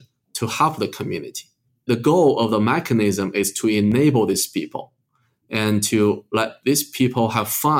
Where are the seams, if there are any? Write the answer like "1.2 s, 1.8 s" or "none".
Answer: 1.7 s